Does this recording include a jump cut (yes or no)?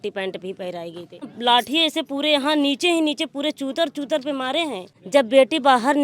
yes